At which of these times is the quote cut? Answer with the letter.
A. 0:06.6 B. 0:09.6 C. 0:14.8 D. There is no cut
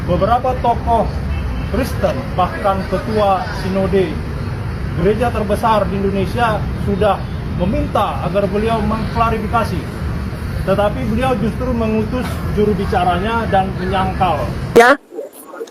C